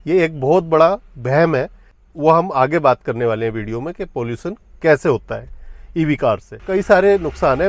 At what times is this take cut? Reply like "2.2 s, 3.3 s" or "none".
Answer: 2.0 s, 6.6 s